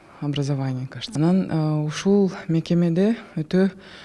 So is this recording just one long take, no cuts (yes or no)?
no